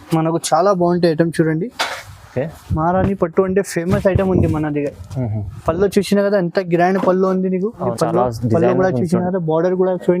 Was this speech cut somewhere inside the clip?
yes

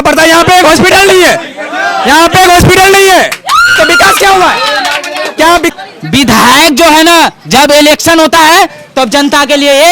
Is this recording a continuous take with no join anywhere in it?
no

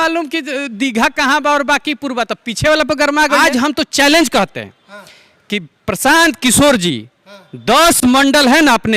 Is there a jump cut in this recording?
yes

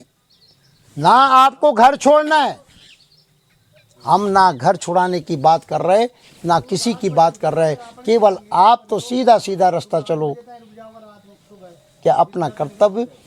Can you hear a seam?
no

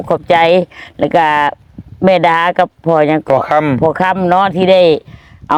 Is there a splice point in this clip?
no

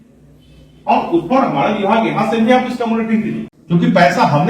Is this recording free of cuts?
no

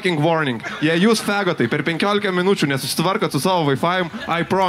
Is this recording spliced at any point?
no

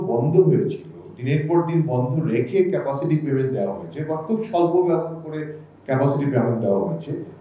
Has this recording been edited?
no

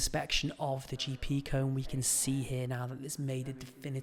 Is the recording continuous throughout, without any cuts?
yes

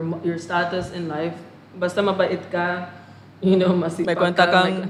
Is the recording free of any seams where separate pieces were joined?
yes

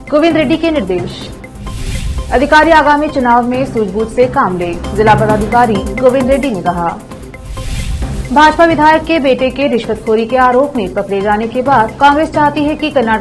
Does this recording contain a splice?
no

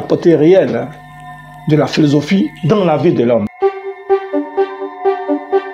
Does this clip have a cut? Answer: no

